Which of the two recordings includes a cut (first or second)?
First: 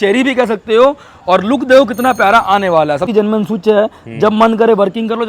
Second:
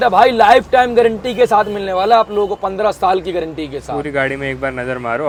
first